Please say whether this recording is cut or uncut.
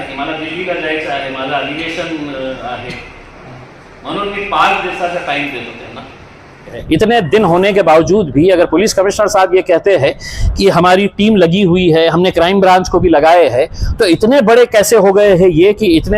cut